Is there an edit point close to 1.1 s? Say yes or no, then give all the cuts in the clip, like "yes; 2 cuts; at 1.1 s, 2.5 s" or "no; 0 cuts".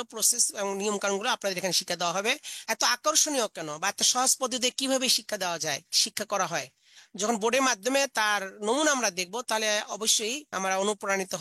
no; 2 cuts; at 2.6 s, 10.4 s